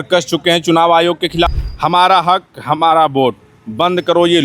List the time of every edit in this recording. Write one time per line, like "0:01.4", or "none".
0:01.5